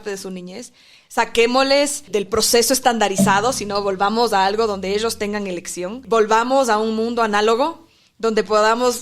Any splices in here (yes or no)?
yes